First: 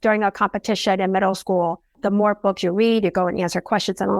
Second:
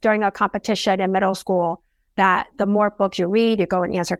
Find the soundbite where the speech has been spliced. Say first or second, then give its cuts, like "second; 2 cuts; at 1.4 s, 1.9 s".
first; 1 cut; at 1.9 s